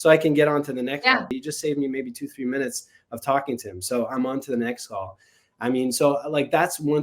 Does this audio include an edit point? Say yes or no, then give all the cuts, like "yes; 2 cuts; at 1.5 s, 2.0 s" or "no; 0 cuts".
yes; 1 cut; at 1.3 s